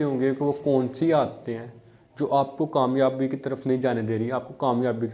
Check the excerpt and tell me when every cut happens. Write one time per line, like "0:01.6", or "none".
none